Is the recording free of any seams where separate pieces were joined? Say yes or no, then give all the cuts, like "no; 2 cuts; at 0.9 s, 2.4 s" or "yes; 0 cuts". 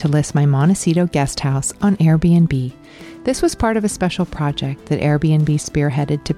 yes; 0 cuts